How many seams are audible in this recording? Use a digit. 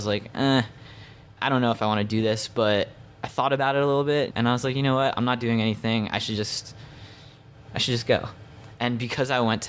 2